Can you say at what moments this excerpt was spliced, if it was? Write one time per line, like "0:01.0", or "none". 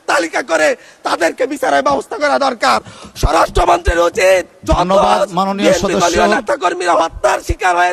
none